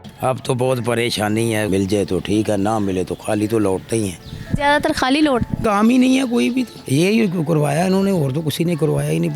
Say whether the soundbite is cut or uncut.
cut